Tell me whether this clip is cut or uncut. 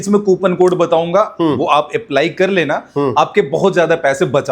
uncut